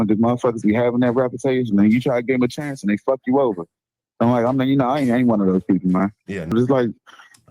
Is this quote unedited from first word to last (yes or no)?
no